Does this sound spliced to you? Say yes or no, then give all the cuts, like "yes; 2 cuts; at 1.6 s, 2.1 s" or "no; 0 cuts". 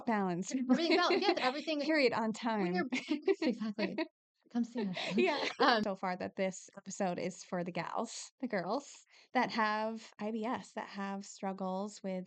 yes; 1 cut; at 5.8 s